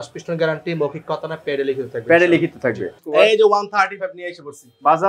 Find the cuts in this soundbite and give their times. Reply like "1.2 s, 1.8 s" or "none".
2.9 s